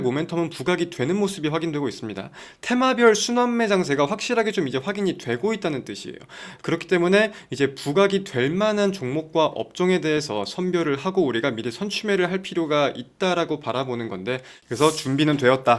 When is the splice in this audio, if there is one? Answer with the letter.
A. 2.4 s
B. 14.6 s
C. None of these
B